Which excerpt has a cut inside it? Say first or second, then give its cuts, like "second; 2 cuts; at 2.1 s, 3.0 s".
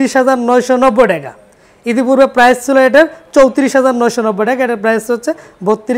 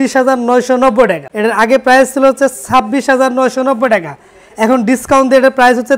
second; 1 cut; at 1.3 s